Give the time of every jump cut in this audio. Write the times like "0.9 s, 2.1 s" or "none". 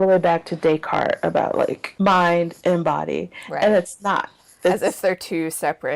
1.8 s